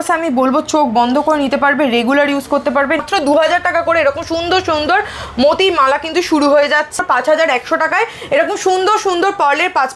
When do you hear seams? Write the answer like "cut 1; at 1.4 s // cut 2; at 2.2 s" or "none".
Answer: cut 1; at 3.0 s // cut 2; at 6.9 s